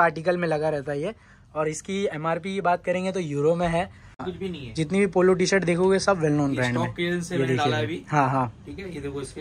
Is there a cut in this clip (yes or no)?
yes